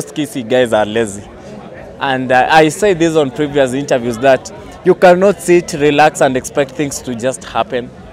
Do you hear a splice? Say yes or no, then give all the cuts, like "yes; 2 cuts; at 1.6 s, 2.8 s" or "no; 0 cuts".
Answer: no; 0 cuts